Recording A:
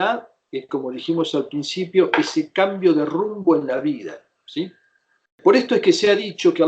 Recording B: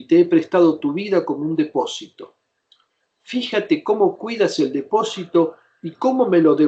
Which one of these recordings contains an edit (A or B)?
A